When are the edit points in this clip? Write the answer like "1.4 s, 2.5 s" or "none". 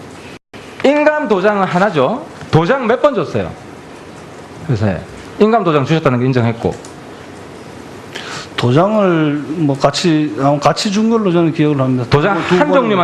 none